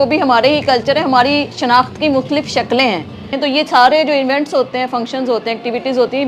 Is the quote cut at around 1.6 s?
no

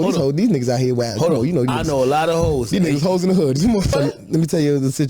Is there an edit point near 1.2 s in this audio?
no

